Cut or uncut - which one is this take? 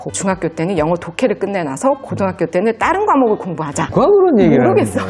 cut